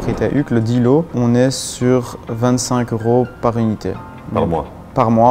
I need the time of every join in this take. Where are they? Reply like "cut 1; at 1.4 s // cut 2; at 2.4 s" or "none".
cut 1; at 1.1 s // cut 2; at 4.3 s